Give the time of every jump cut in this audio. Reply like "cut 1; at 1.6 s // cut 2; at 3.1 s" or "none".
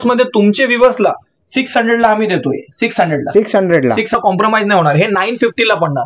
cut 1; at 4.1 s